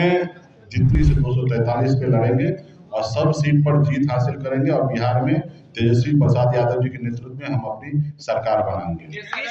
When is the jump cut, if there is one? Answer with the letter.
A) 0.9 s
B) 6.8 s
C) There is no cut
A